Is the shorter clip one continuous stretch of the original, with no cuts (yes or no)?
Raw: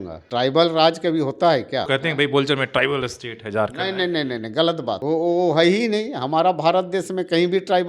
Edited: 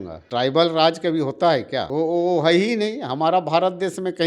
no